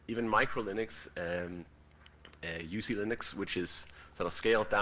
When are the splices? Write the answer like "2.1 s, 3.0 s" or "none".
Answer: 2.1 s